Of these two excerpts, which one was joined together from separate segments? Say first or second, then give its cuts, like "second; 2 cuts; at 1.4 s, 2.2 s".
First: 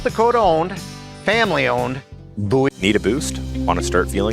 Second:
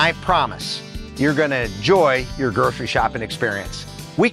first; 1 cut; at 2.7 s